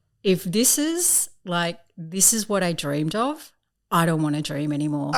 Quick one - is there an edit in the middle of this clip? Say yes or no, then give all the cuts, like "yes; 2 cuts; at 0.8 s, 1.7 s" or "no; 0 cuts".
no; 0 cuts